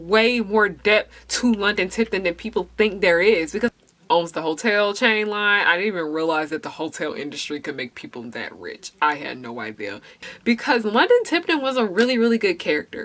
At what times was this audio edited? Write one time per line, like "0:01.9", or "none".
0:03.7
0:10.1